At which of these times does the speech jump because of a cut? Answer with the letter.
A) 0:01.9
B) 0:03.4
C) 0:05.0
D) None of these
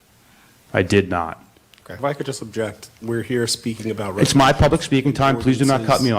A